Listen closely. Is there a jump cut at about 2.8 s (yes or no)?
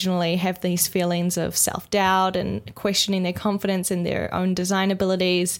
no